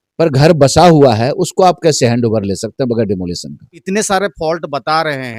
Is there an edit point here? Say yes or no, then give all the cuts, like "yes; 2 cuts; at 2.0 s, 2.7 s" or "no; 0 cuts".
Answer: yes; 1 cut; at 3.8 s